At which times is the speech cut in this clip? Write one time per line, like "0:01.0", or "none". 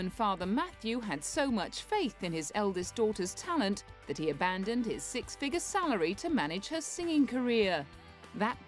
none